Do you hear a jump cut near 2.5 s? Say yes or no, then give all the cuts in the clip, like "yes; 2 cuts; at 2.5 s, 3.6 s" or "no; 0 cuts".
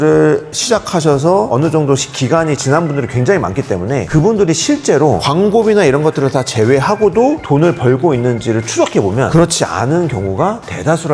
no; 0 cuts